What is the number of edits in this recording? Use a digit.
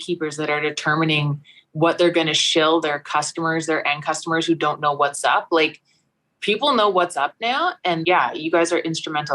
1